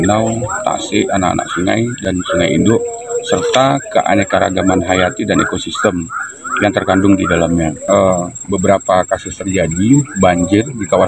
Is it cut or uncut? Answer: cut